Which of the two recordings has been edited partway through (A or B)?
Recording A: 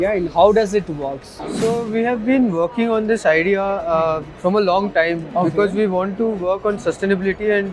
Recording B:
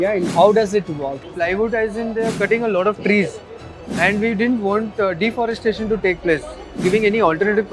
B